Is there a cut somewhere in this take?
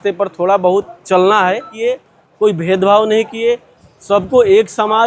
yes; 1 cut; at 1.7 s

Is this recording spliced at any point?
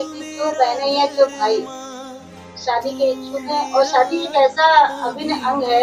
no; 0 cuts

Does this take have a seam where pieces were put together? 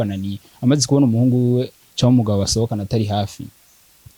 no; 0 cuts

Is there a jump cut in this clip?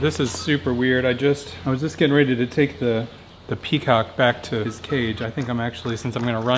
yes; 2 cuts; at 1.5 s, 4.8 s

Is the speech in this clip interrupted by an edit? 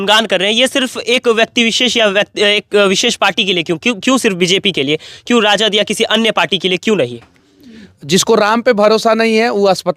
no; 0 cuts

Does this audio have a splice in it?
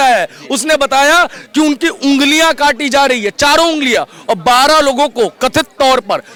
no; 0 cuts

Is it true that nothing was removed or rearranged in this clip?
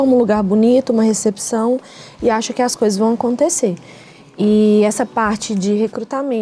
yes; 0 cuts

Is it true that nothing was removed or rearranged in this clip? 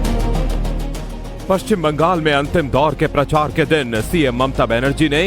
no; 1 cut; at 1.9 s

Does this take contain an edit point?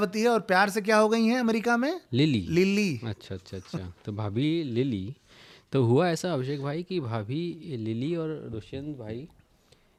no; 0 cuts

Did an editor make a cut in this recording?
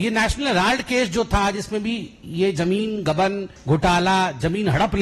yes; 1 cut; at 3.5 s

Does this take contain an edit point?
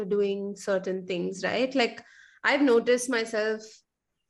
no; 0 cuts

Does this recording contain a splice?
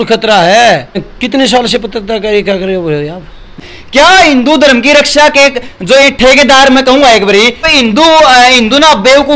yes; 3 cuts; at 1.1 s, 3.6 s, 7.6 s

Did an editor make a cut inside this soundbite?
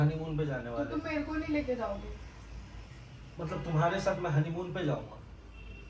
no; 0 cuts

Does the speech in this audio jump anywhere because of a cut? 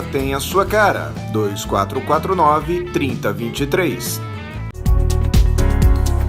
yes; 1 cut; at 4.8 s

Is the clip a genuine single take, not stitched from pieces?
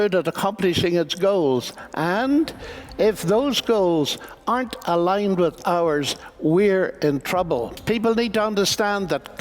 no; 1 cut; at 7.7 s

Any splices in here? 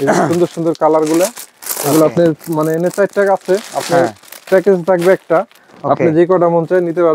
no; 0 cuts

